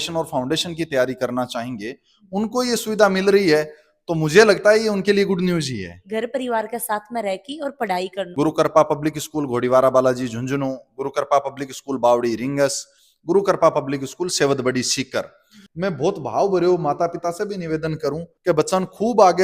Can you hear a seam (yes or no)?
yes